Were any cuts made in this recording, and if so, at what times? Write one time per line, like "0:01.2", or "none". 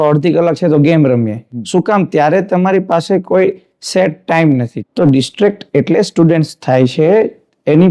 0:04.8